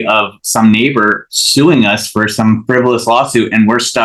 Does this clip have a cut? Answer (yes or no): no